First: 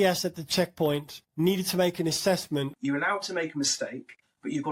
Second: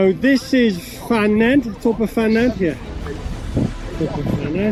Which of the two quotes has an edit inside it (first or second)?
first